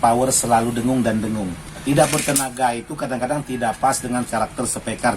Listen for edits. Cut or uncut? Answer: cut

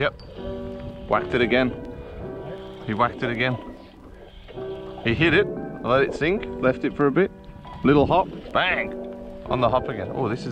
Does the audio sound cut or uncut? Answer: uncut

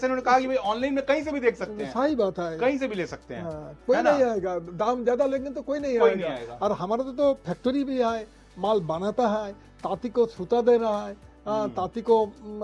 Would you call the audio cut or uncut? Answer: uncut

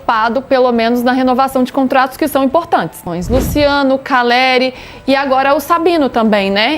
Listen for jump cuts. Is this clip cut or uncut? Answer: cut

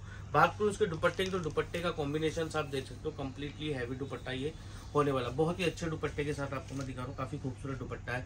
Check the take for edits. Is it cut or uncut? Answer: uncut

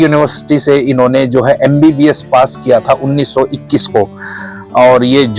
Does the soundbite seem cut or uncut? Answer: uncut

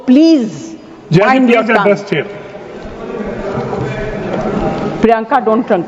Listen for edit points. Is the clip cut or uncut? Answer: uncut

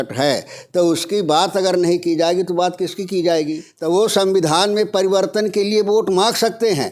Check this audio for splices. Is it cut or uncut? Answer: cut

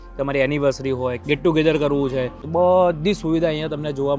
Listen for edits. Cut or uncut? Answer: cut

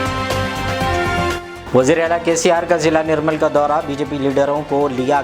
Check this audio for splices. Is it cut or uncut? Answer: uncut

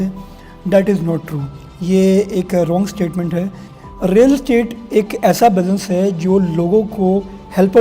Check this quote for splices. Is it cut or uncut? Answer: cut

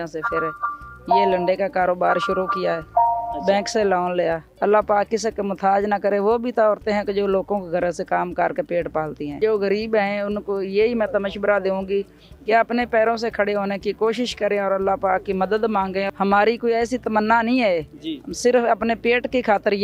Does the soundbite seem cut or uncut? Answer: cut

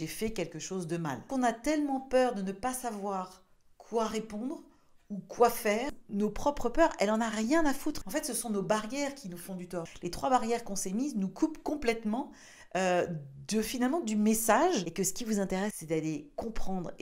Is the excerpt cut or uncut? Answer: cut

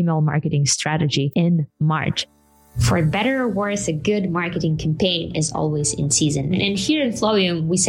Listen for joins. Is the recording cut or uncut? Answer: uncut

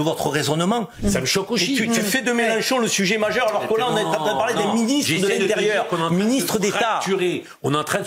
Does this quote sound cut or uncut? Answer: cut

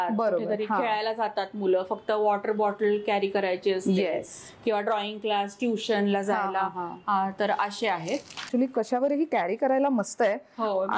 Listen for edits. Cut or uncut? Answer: cut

